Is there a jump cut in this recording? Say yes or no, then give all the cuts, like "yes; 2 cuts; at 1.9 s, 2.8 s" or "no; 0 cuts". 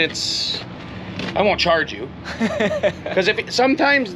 no; 0 cuts